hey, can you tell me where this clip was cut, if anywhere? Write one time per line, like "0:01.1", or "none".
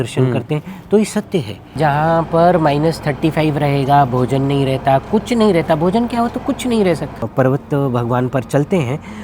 0:01.8
0:07.3